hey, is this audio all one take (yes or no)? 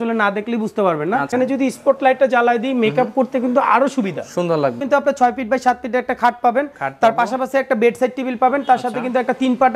no